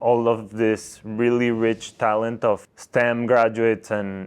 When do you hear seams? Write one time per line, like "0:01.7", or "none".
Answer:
0:02.7